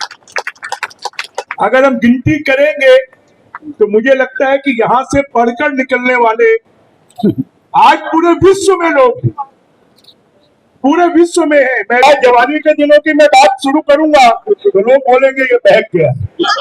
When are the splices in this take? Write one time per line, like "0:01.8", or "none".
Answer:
0:01.5
0:12.0